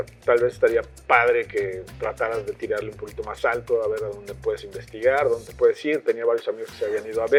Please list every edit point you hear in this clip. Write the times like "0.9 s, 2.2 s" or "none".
none